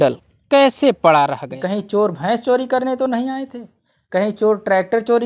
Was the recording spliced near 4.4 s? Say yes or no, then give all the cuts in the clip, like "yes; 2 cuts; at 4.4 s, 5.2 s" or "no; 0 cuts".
no; 1 cut; at 1.5 s